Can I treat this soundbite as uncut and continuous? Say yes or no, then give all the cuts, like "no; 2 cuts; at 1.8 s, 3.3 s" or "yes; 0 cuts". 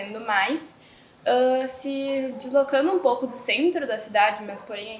yes; 0 cuts